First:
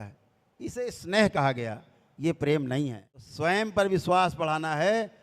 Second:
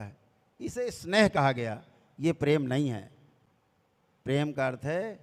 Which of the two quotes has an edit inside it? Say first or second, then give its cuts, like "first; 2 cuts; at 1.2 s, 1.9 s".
first; 1 cut; at 3.7 s